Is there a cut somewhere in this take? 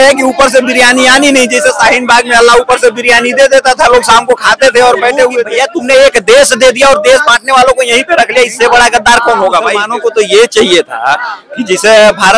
yes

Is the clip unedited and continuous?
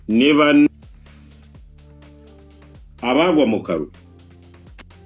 yes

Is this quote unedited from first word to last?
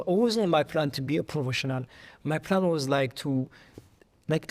yes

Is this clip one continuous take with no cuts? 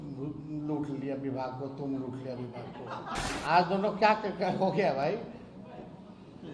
no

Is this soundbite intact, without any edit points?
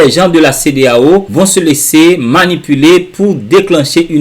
no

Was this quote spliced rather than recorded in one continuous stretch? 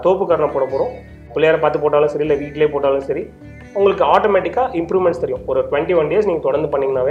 yes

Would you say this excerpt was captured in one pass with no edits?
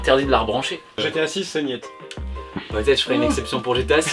no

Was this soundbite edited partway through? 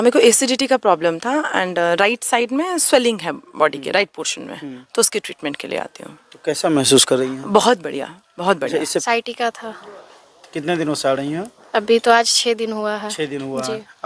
yes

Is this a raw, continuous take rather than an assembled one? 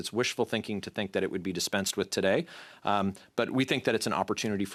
yes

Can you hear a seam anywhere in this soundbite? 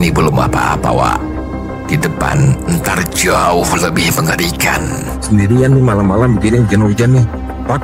no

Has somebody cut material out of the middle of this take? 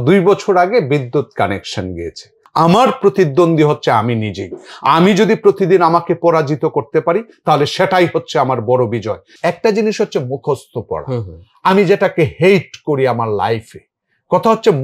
yes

